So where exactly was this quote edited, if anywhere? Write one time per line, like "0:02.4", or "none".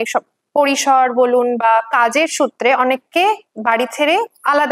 none